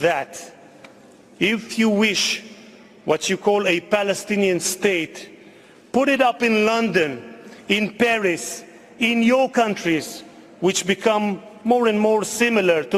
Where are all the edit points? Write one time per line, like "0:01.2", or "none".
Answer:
none